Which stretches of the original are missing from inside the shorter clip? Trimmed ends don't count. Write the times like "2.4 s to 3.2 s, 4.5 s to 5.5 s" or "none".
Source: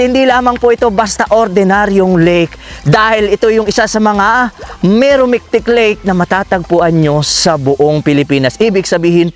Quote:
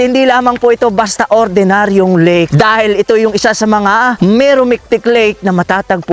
2.5 s to 2.8 s, 4.5 s to 4.8 s